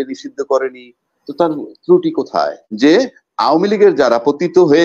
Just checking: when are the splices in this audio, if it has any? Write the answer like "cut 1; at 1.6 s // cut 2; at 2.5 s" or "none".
cut 1; at 2.6 s